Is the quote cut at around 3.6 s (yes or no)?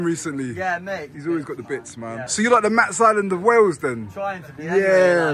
no